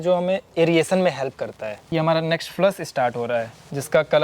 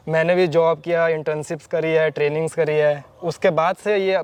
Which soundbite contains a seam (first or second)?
first